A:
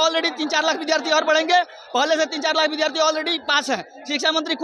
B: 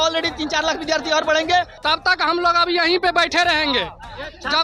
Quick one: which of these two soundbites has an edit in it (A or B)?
B